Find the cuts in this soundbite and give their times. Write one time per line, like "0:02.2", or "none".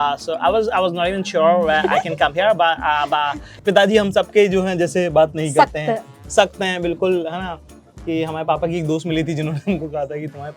0:03.5